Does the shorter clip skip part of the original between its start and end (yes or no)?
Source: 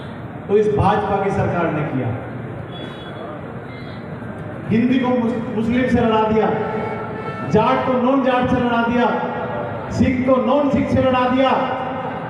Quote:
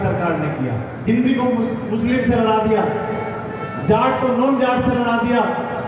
yes